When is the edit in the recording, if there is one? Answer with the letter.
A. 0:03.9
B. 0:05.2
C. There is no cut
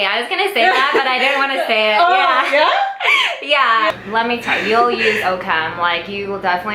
A